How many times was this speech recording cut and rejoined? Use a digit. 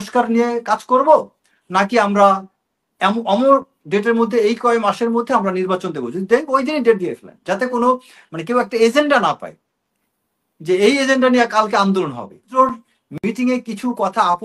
1